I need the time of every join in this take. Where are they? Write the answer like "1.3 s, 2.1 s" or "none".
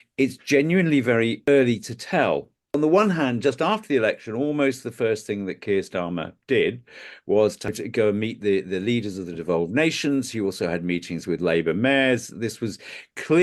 1.5 s, 2.6 s, 7.8 s